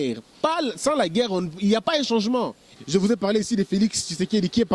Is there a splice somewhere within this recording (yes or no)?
yes